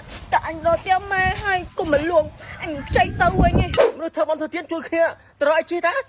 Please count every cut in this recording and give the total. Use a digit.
1